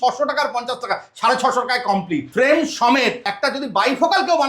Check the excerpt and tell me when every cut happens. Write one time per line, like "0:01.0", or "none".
0:02.3
0:03.2